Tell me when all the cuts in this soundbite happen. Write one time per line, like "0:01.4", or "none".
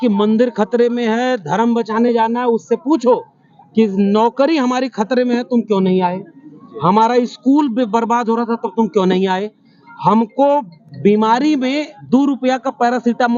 none

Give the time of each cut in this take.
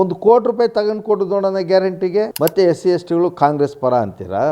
0:02.3

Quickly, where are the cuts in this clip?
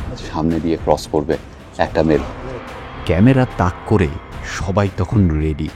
none

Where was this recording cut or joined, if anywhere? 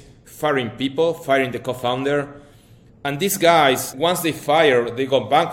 0:03.9

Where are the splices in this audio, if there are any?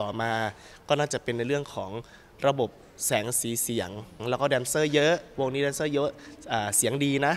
0:04.2

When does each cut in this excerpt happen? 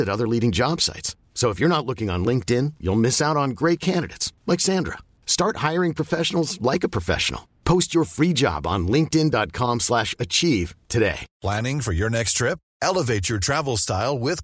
0:11.3

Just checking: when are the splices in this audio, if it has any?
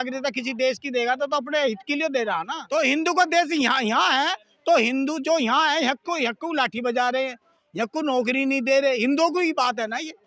0:02.6

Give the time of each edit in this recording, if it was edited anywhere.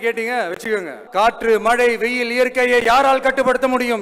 0:01.0

